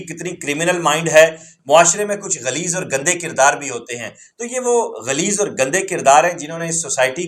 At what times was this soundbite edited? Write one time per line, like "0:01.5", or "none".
0:01.5